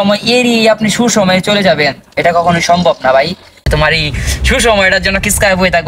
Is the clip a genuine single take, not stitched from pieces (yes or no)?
no